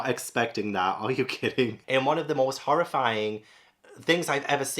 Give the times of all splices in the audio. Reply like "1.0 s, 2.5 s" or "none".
1.8 s